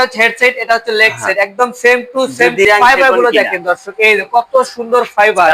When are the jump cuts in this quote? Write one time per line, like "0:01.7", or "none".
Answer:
0:02.7